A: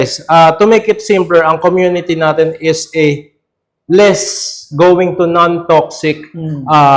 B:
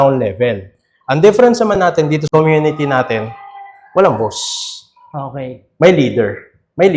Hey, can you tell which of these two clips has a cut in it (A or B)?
B